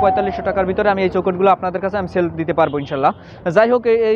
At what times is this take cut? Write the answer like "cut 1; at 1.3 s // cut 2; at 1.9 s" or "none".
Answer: none